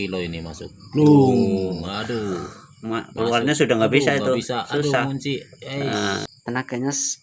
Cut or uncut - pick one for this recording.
cut